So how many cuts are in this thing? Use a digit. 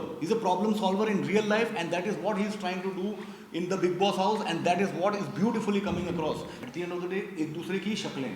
1